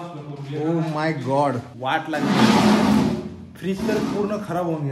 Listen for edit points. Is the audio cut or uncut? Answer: cut